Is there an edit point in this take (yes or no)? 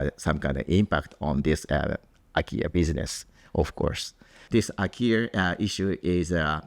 yes